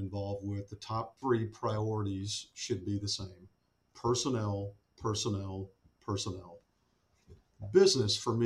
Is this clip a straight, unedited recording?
no; 1 cut; at 1.1 s

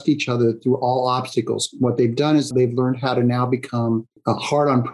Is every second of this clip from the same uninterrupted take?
no; 2 cuts; at 2.5 s, 4.1 s

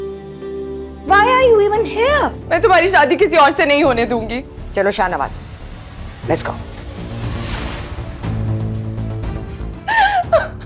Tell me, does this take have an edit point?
yes; 2 cuts; at 2.4 s, 4.6 s

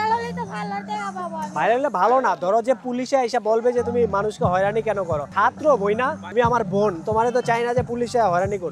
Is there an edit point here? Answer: no; 0 cuts

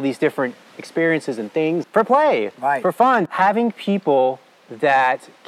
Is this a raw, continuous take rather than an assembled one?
no; 2 cuts; at 1.8 s, 3.3 s

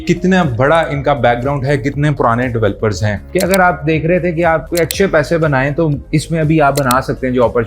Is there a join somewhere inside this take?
yes; 2 cuts; at 3.3 s, 4.7 s

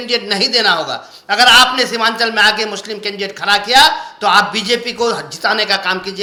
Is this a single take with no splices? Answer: yes; 0 cuts

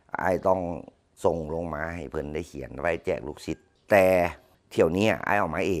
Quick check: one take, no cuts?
no; 1 cut; at 3.7 s

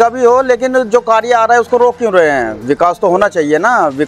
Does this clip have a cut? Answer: no; 0 cuts

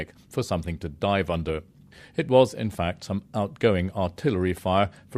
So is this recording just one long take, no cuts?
yes; 0 cuts

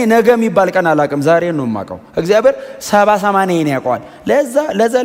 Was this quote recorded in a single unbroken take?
yes; 0 cuts

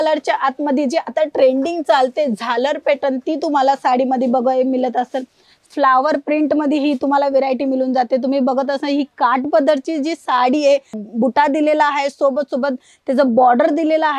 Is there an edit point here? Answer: yes; 2 cuts; at 5.6 s, 11.0 s

